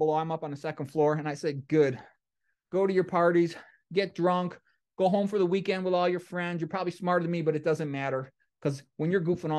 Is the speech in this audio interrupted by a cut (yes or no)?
no